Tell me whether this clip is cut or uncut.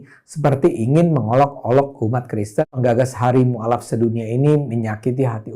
cut